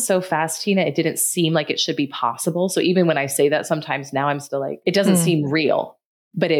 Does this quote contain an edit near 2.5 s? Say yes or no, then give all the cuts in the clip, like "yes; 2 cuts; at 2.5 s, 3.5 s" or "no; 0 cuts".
no; 1 cut; at 4.7 s